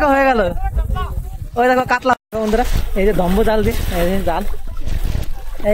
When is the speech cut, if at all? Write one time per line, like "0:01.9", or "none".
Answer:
0:02.1